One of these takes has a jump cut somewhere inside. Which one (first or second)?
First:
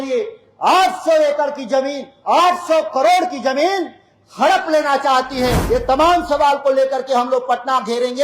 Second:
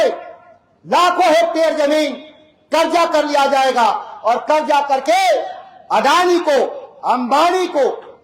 first